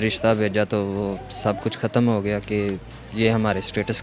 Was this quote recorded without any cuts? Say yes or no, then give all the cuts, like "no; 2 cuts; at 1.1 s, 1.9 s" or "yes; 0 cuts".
yes; 0 cuts